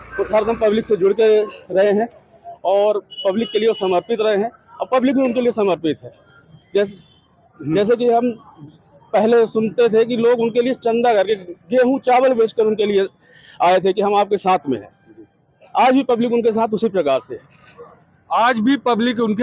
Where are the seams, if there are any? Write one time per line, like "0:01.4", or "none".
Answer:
none